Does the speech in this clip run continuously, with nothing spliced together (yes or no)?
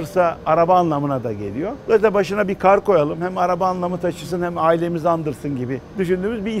yes